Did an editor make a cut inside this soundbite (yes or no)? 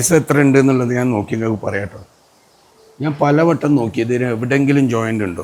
no